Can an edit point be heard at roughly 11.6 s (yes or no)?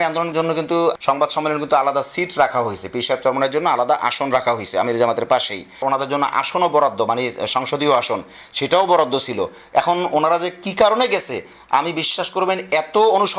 no